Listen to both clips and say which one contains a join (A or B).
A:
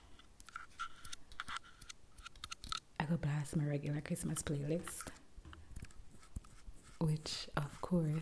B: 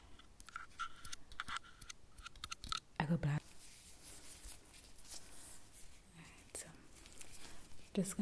B